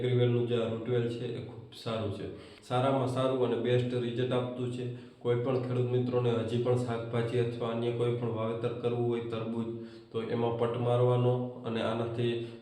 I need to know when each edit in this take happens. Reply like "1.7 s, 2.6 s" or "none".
2.5 s